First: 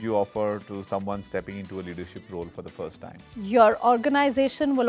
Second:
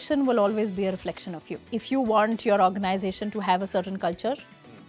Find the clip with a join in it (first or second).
second